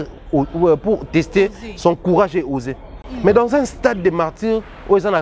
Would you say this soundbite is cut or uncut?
uncut